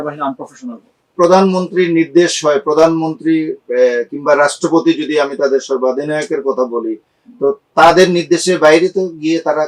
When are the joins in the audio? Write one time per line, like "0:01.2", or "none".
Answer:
0:01.1